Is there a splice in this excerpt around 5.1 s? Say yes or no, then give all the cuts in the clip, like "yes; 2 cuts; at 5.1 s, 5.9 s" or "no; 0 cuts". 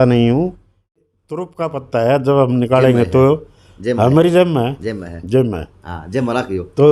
no; 1 cut; at 0.9 s